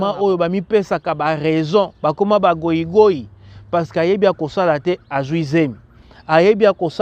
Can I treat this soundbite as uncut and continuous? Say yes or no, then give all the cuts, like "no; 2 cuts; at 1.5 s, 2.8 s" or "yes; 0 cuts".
yes; 0 cuts